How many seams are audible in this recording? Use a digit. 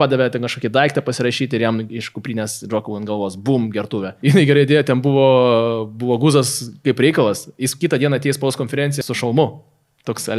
2